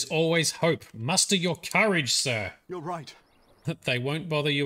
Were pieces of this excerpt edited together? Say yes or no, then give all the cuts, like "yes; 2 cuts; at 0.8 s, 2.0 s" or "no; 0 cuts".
yes; 1 cut; at 3.5 s